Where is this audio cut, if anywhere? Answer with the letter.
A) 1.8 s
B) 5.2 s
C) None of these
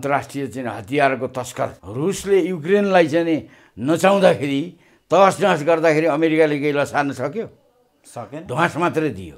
A